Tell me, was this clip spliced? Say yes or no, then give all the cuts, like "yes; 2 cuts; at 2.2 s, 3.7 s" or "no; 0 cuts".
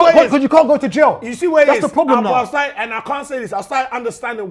no; 0 cuts